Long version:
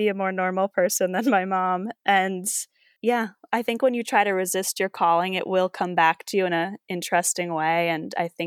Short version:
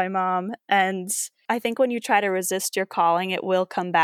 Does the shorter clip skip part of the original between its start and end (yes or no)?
yes